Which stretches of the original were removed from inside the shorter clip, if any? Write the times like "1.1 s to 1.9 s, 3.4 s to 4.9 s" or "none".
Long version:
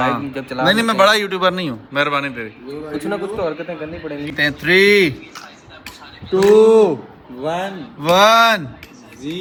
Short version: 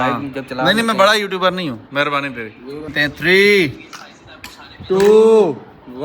2.9 s to 4.3 s